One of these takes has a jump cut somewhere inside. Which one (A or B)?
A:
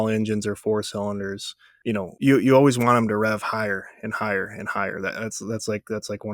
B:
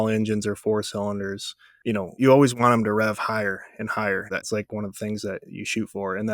B